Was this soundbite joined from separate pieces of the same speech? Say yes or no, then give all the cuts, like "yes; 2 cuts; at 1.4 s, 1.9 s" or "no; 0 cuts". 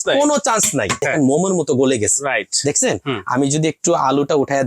yes; 1 cut; at 1.0 s